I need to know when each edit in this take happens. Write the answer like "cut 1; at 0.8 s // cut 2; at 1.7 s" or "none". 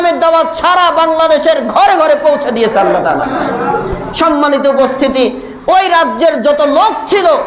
none